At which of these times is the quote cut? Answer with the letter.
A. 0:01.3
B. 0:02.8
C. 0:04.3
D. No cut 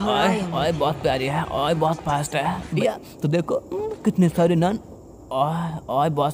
B